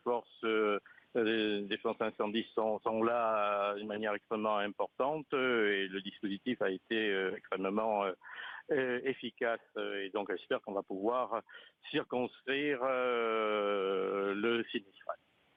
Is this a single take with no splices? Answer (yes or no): yes